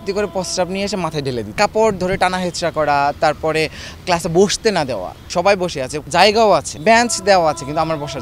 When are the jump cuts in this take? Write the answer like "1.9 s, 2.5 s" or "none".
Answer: 1.5 s, 5.1 s, 6.0 s, 6.7 s